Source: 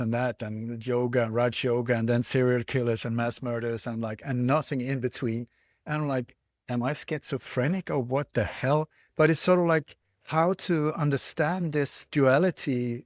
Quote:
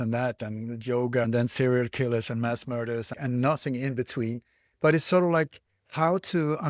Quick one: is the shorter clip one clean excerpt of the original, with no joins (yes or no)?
no